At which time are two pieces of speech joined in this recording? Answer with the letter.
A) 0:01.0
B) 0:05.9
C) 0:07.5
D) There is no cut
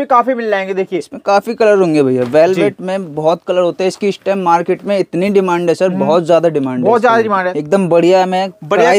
C